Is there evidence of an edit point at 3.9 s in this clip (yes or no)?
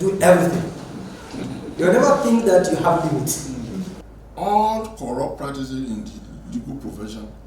yes